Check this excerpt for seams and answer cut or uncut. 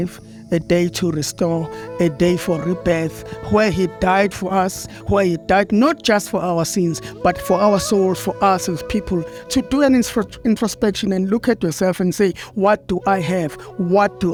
uncut